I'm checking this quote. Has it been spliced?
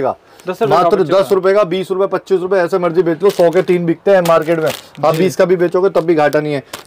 no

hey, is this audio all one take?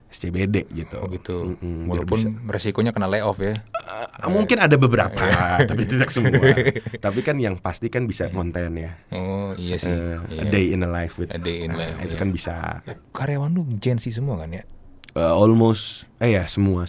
no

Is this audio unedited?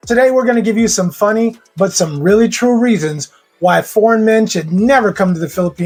yes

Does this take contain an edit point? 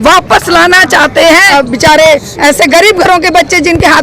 yes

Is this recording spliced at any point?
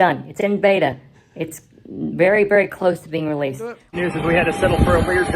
yes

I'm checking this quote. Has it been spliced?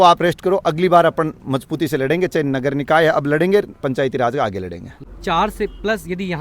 yes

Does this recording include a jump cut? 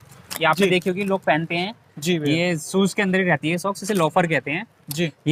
no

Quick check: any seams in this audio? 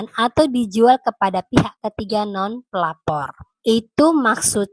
no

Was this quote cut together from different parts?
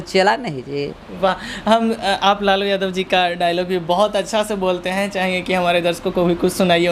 no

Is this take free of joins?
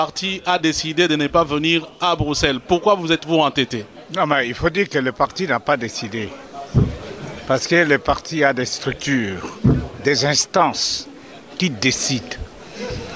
no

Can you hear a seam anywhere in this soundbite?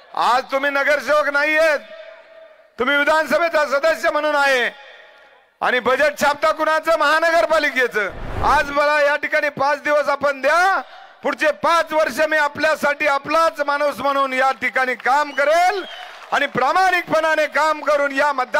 yes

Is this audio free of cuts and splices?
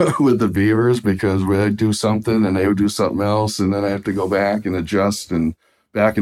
yes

